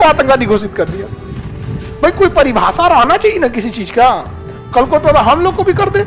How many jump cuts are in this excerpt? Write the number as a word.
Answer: zero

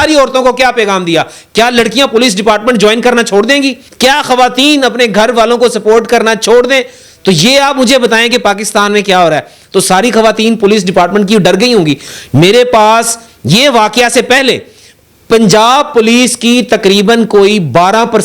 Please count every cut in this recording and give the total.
zero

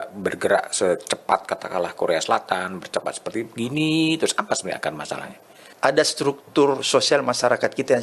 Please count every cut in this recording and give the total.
one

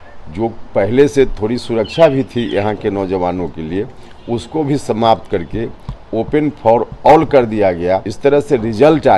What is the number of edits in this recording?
one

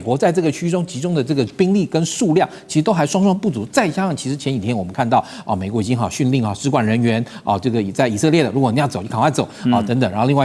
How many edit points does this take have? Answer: zero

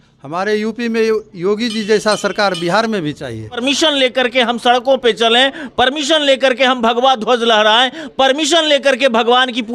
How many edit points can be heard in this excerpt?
one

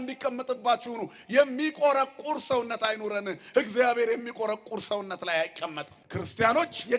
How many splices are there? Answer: one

